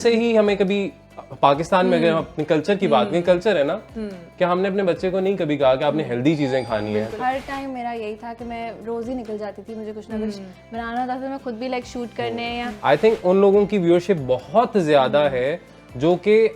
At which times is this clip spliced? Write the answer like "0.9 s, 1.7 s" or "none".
7.1 s, 12.7 s